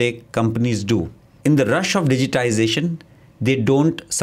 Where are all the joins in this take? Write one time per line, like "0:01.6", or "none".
0:01.3